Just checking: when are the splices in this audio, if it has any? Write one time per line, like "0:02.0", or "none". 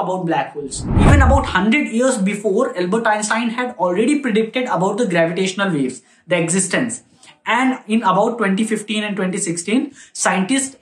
0:00.9